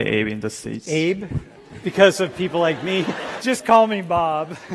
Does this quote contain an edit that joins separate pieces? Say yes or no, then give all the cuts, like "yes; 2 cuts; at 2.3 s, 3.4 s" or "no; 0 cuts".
yes; 1 cut; at 3.3 s